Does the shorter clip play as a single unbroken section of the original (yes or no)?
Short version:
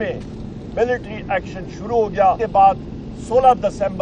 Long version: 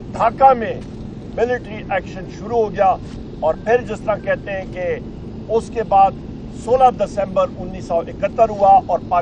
no